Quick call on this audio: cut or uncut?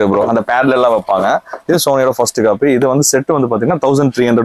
uncut